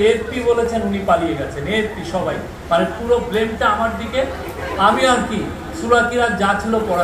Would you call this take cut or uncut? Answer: uncut